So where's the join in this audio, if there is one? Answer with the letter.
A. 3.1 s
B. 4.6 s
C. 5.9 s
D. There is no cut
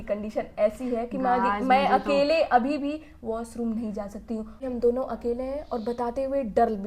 B